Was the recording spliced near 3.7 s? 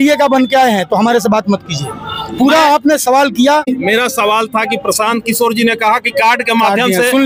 yes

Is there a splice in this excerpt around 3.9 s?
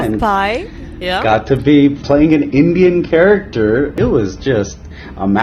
yes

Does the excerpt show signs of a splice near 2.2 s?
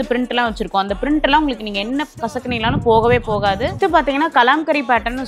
no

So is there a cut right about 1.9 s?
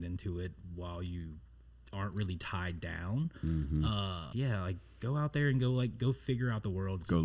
no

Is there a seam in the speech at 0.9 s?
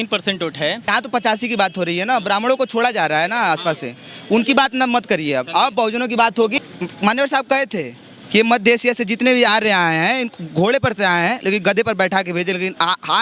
yes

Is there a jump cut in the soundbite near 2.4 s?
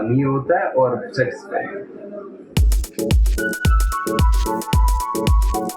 yes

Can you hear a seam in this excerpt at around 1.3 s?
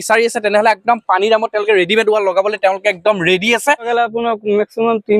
no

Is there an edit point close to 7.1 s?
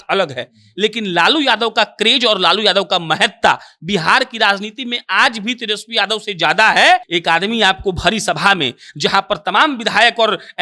yes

